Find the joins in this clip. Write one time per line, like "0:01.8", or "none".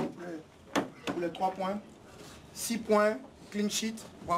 none